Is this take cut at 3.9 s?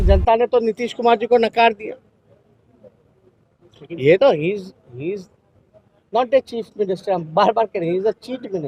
no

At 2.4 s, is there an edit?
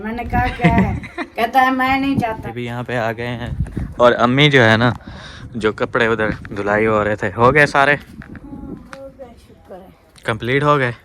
yes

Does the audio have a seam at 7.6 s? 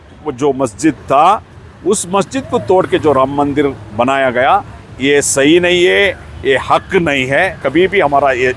yes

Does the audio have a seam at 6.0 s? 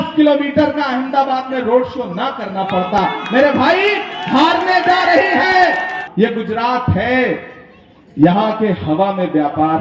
yes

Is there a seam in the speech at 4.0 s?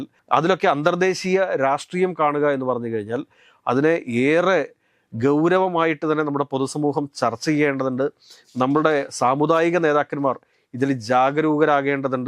no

